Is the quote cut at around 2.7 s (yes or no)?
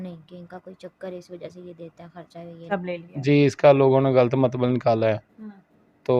yes